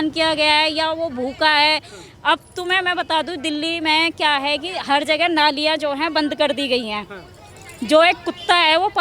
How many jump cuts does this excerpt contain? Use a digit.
0